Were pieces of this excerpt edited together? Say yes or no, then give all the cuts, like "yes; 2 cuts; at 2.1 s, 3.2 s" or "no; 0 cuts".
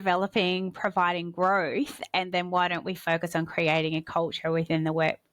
no; 0 cuts